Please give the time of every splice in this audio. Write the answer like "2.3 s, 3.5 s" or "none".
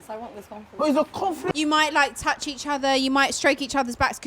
1.4 s